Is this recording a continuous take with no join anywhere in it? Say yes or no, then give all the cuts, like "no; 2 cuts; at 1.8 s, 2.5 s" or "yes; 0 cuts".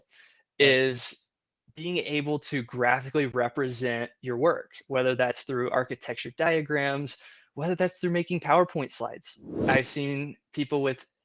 no; 1 cut; at 9.6 s